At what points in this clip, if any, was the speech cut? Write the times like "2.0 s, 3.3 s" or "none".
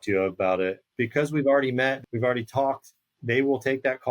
0.8 s, 2.0 s